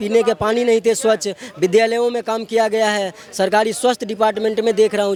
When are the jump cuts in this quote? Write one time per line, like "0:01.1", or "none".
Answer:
none